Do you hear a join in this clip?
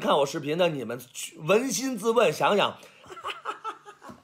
yes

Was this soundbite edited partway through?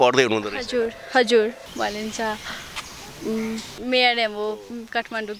yes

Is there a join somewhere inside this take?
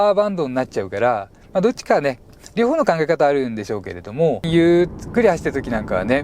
yes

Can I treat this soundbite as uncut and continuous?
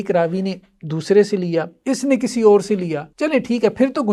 no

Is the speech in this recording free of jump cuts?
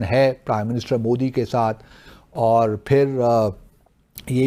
yes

